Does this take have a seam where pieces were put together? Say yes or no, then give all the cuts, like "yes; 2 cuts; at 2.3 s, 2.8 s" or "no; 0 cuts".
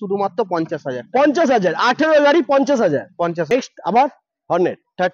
yes; 1 cut; at 3.5 s